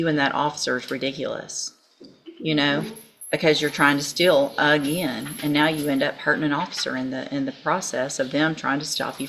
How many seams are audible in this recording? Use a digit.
0